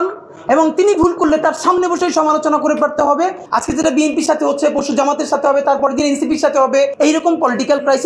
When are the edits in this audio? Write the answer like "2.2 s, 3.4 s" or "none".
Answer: 3.4 s, 6.9 s